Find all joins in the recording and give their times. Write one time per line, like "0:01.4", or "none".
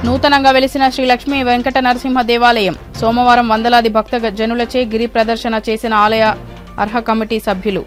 none